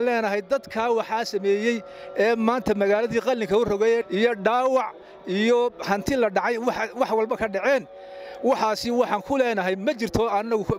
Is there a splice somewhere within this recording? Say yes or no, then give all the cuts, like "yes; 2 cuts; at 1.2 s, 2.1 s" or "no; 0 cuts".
no; 0 cuts